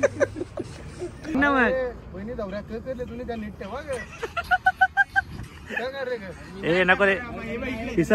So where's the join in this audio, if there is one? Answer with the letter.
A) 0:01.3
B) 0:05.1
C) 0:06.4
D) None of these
A